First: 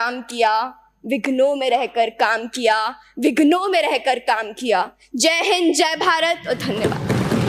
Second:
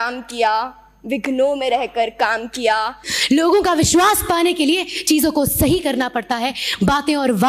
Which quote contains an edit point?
second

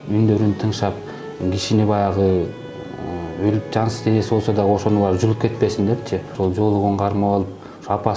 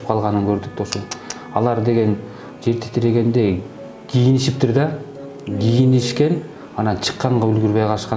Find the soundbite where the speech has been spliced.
first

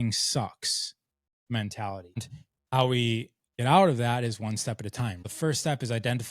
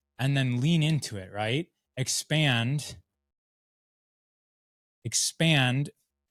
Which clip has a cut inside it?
first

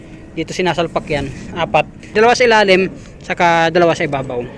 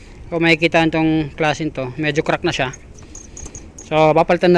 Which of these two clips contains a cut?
first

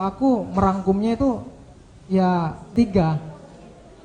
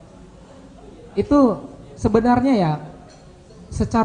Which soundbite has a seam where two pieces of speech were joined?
first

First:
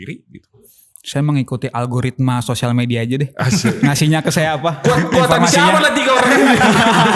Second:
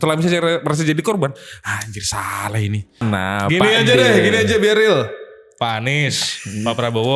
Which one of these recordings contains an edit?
second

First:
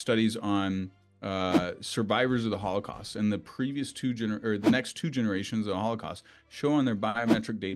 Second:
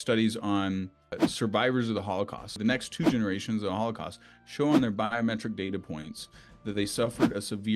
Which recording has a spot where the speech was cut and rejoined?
second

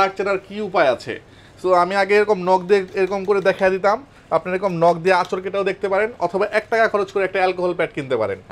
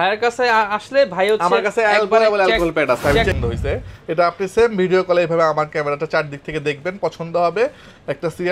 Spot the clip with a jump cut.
second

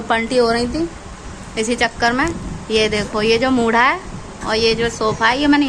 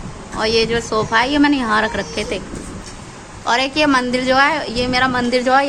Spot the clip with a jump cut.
second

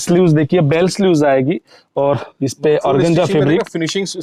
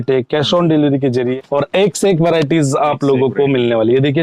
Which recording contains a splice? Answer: second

